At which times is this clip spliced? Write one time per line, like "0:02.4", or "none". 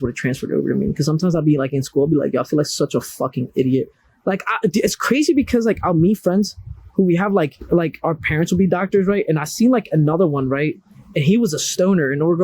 0:07.6